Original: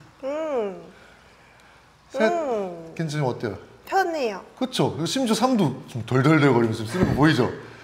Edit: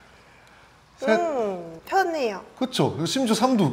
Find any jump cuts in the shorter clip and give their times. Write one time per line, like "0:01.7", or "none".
0:01.7